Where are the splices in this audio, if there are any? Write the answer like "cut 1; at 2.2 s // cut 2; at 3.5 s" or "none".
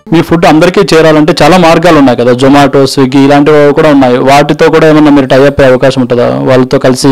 none